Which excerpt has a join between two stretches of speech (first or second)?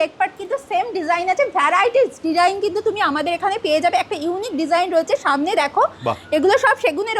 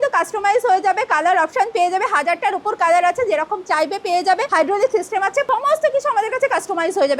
second